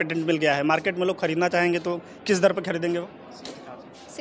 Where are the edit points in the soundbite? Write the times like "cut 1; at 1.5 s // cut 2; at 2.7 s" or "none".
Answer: none